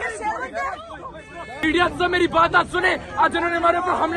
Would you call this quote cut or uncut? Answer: cut